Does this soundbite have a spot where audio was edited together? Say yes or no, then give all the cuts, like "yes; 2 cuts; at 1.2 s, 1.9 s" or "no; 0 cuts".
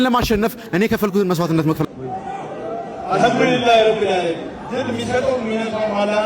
yes; 1 cut; at 1.8 s